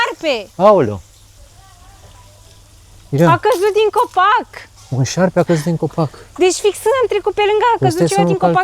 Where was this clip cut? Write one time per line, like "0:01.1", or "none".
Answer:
none